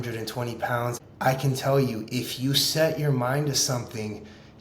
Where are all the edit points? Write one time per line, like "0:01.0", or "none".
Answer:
0:00.9